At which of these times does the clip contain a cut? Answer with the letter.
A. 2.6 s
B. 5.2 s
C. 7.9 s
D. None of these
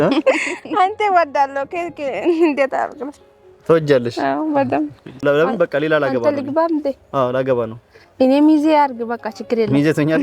B